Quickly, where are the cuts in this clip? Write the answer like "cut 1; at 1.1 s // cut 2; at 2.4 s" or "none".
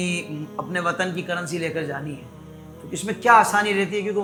none